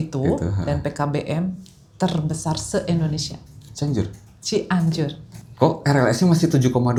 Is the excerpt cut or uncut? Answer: uncut